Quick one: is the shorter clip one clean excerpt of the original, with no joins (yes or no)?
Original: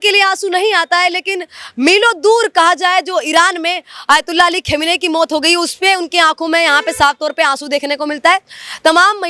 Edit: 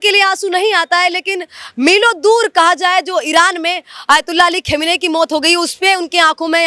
yes